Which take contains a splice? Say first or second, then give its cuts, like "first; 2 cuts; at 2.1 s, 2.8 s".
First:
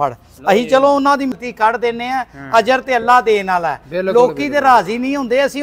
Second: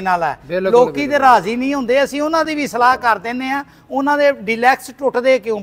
first; 1 cut; at 1.3 s